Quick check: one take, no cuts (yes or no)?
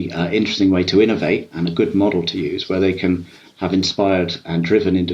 yes